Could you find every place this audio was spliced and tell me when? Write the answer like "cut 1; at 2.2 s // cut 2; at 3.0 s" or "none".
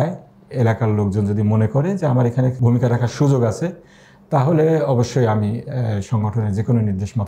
none